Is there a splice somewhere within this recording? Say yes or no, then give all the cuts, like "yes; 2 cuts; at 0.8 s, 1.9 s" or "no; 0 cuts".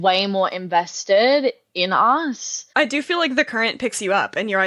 yes; 1 cut; at 2.5 s